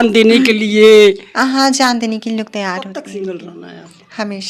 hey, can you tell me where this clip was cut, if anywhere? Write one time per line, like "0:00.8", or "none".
0:03.0